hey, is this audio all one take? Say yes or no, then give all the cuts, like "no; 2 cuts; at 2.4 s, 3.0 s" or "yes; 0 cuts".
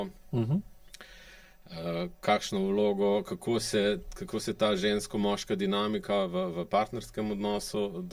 yes; 0 cuts